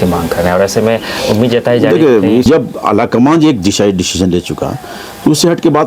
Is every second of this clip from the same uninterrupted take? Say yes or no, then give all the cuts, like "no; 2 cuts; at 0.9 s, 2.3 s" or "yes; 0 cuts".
no; 1 cut; at 2.4 s